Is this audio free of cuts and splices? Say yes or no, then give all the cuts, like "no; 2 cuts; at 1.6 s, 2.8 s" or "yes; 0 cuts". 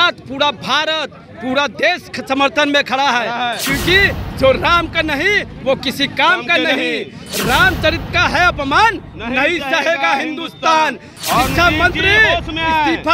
yes; 0 cuts